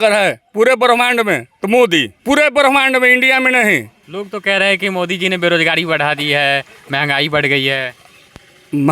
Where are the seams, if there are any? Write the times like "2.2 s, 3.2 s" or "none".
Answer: 1.5 s, 2.1 s, 4.0 s